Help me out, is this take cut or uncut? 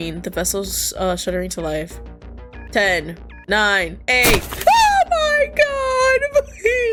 uncut